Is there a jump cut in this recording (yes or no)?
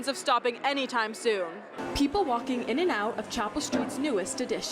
yes